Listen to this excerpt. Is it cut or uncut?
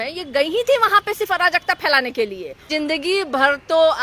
cut